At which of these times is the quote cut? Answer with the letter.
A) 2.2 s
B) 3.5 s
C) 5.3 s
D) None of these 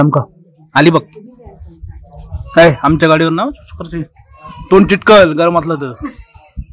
D